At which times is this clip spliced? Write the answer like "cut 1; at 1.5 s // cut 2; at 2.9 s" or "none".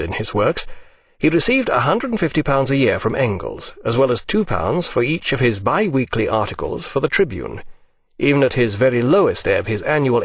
cut 1; at 3.3 s